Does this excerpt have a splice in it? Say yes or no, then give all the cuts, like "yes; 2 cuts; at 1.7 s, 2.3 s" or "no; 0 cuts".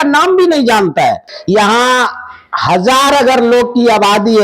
yes; 1 cut; at 1.3 s